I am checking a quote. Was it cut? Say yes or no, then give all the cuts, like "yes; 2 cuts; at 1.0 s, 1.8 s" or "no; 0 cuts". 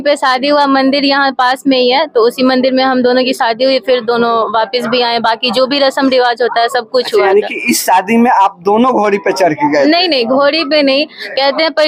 no; 0 cuts